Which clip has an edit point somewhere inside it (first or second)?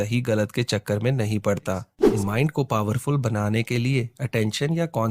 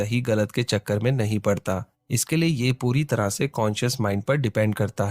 first